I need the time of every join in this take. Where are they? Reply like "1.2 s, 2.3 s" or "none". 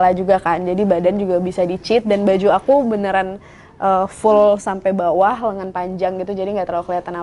none